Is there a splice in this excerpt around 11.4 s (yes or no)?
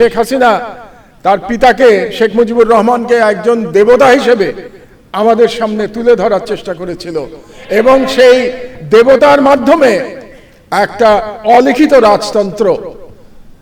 no